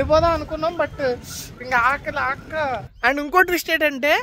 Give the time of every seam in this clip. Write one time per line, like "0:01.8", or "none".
0:02.9